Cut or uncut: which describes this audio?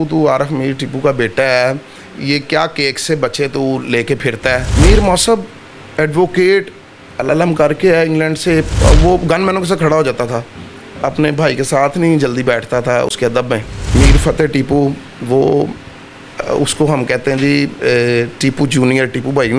cut